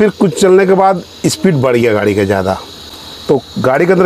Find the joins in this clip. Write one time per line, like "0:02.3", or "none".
0:02.8